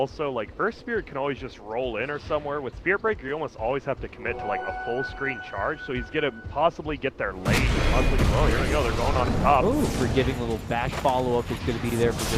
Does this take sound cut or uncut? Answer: cut